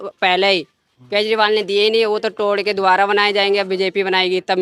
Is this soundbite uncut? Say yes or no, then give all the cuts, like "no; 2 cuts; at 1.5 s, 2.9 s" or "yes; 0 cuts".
yes; 0 cuts